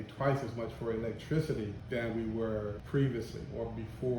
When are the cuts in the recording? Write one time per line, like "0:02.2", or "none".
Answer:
0:01.8
0:02.8